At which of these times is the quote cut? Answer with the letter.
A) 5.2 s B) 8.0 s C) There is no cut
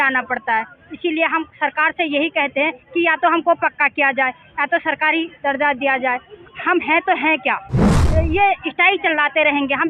B